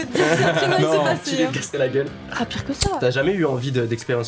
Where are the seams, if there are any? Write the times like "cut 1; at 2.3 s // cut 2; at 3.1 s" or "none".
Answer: cut 1; at 1.5 s // cut 2; at 3.0 s